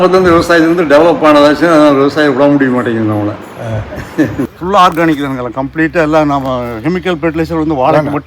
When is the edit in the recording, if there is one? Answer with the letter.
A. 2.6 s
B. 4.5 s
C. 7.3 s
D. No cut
B